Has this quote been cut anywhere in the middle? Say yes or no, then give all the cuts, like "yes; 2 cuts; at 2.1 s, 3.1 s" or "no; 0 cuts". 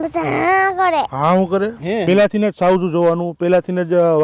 yes; 1 cut; at 2.0 s